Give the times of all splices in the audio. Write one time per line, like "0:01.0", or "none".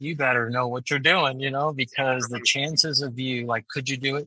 none